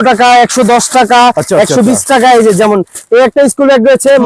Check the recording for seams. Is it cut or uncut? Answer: uncut